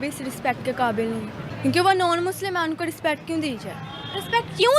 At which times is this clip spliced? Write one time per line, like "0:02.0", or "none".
0:01.4

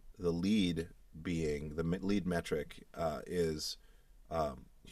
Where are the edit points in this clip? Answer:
none

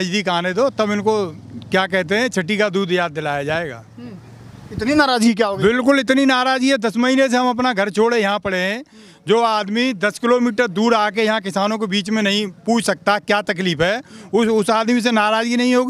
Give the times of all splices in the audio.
none

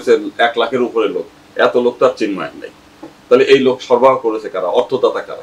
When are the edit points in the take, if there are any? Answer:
none

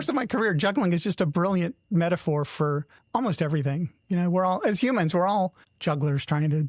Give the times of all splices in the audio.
0:02.9
0:05.7

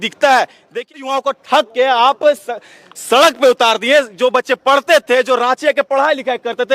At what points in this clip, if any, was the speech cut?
0:00.9

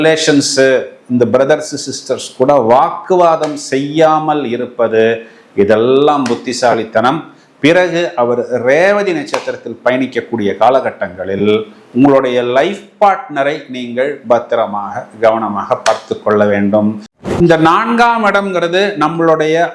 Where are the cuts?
0:17.3

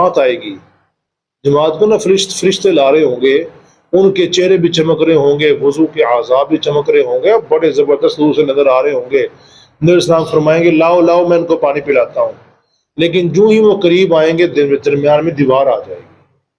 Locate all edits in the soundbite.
none

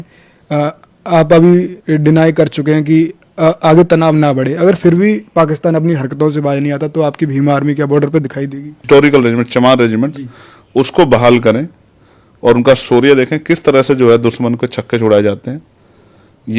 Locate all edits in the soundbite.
0:08.7

